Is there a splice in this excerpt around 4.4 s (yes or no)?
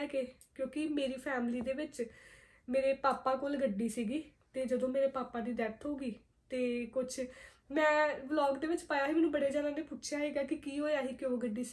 no